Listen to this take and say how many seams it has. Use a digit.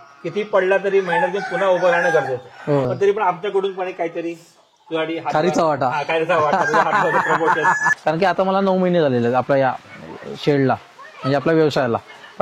2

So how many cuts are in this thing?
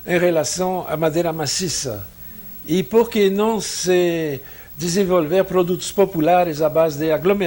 0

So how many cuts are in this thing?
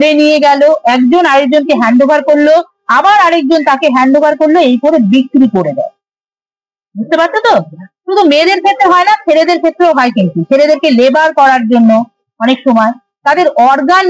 0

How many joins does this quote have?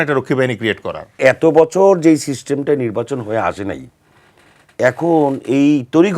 1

